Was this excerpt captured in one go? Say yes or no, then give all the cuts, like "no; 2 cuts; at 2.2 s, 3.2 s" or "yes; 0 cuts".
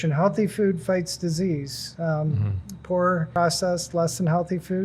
no; 1 cut; at 3.3 s